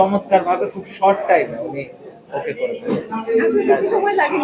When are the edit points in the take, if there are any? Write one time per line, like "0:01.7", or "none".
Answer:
none